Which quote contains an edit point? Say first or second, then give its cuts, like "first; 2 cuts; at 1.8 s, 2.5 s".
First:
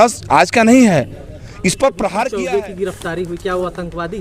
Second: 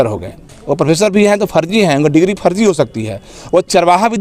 first; 1 cut; at 2.3 s